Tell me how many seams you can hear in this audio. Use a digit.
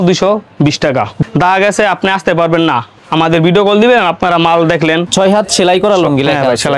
2